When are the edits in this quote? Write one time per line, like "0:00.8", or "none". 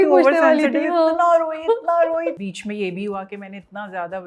0:02.4

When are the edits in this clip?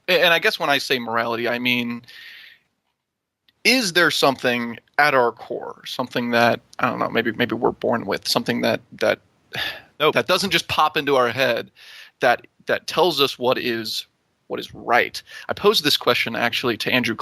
0:15.6

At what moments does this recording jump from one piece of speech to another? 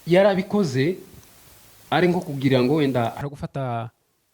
0:03.2

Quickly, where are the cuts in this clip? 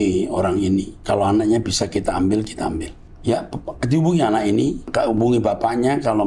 0:00.9
0:04.8

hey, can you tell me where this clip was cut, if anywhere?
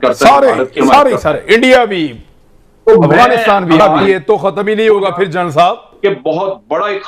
0:04.0
0:05.9

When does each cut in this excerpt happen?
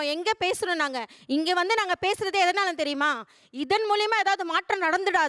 0:01.1

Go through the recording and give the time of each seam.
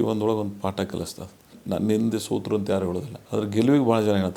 0:01.6
0:03.1

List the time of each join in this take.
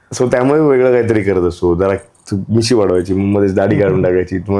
none

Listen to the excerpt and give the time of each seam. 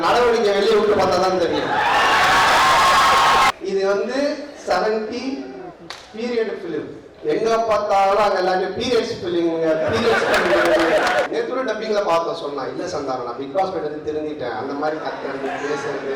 0:03.5
0:11.3

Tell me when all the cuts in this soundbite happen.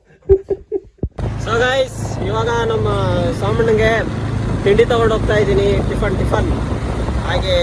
none

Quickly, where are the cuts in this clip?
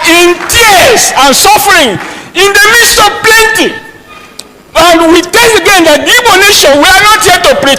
none

